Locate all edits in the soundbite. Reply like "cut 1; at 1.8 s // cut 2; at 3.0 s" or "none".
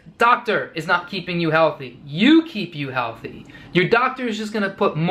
none